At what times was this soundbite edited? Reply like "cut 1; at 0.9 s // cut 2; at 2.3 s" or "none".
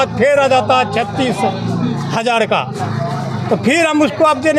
none